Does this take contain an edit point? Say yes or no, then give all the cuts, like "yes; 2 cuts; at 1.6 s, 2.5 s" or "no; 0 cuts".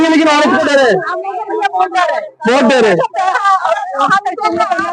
no; 0 cuts